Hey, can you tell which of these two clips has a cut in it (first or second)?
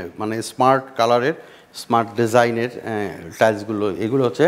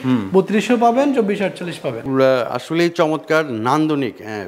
second